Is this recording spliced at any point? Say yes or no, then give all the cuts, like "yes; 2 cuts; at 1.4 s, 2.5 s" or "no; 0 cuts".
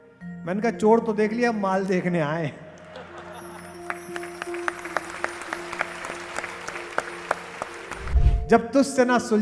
yes; 1 cut; at 8.1 s